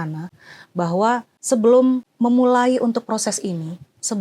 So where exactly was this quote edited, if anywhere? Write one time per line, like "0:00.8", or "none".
0:01.3
0:02.1